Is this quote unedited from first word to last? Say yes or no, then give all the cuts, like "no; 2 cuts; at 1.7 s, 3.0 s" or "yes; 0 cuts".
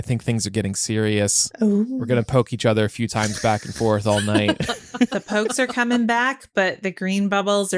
no; 2 cuts; at 1.4 s, 5.2 s